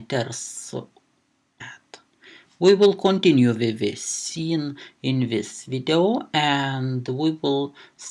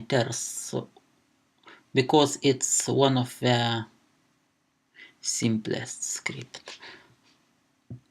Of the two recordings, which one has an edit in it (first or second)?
second